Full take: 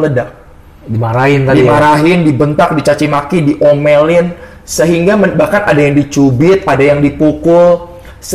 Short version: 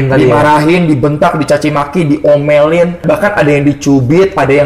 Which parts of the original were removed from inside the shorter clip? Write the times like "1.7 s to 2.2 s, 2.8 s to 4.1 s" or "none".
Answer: 4.4 s to 5.3 s